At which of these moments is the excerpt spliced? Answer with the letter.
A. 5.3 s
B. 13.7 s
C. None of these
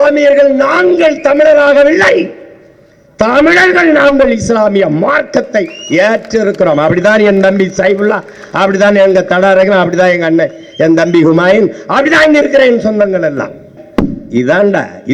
B